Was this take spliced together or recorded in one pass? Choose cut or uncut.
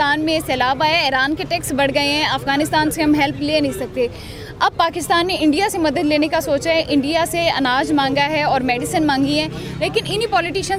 uncut